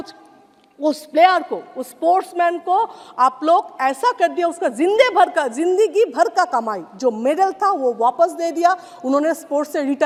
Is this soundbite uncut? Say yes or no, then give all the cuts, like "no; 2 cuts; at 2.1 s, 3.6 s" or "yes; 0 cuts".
yes; 0 cuts